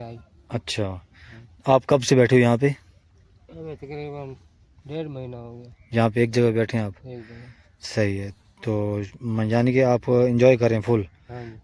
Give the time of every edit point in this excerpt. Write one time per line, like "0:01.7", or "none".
none